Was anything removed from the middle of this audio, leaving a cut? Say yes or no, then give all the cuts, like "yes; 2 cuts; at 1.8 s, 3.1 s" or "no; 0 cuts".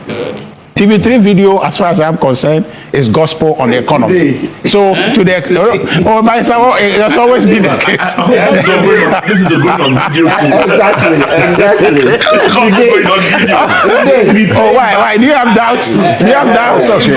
no; 0 cuts